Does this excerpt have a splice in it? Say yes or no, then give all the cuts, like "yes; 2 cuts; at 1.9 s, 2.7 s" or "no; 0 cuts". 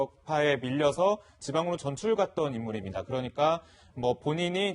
yes; 1 cut; at 2.8 s